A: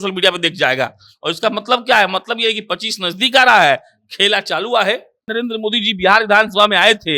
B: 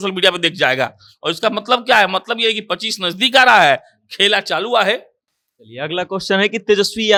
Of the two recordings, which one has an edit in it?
A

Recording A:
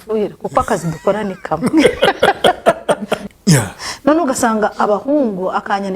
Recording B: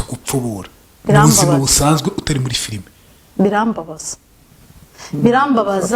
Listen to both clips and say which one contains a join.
A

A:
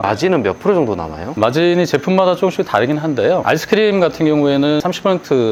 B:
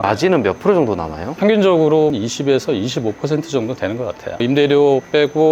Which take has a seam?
B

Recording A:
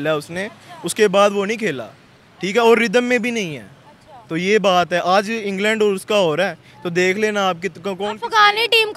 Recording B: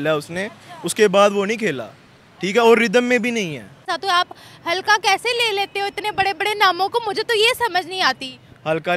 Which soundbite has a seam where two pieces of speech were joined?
B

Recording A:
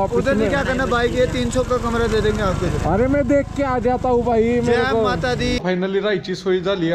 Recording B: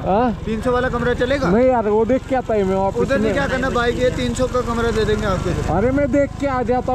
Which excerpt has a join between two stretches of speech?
A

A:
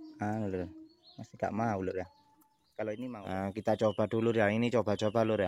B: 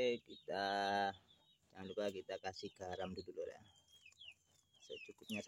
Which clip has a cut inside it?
A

